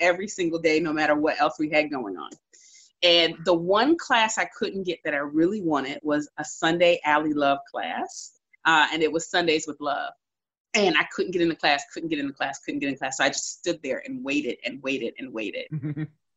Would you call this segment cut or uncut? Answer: uncut